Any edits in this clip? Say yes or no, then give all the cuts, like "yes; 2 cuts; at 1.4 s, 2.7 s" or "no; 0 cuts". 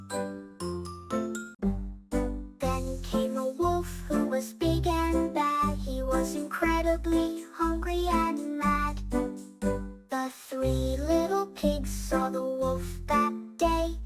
no; 0 cuts